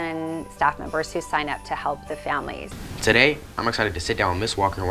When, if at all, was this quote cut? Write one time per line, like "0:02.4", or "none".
0:02.8